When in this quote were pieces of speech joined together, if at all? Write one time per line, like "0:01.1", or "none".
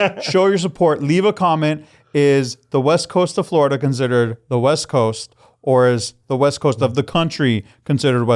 none